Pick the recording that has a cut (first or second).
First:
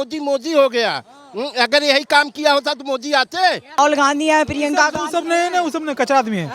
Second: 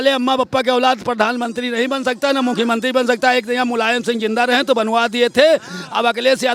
first